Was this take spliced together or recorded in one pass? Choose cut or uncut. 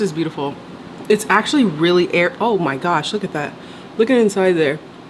uncut